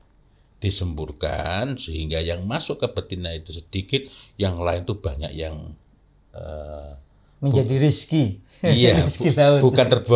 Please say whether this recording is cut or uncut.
uncut